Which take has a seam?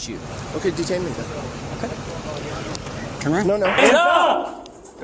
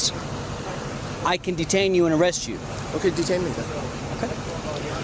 first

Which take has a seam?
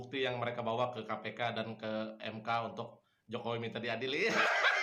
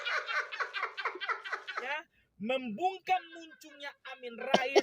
second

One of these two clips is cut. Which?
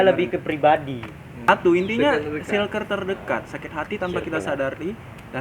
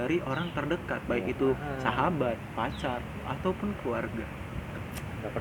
first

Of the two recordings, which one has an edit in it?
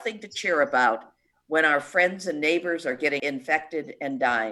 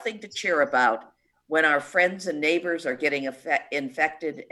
first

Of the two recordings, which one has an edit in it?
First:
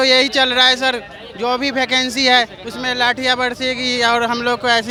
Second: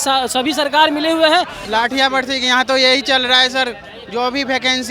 second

